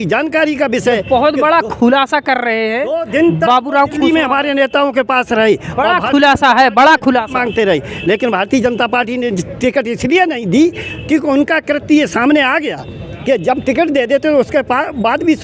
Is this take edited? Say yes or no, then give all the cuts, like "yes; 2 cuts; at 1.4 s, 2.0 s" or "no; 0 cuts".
no; 0 cuts